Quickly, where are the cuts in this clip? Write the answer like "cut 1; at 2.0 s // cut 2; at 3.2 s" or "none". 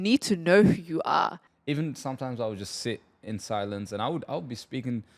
cut 1; at 1.4 s